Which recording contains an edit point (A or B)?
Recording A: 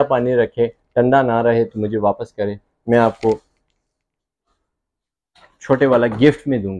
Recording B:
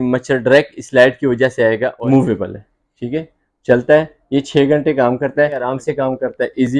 B